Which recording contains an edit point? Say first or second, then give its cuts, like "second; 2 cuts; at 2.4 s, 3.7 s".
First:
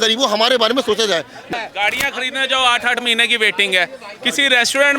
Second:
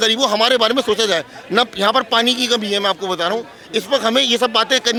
first; 1 cut; at 1.5 s